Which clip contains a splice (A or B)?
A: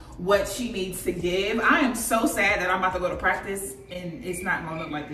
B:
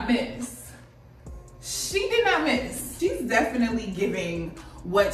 B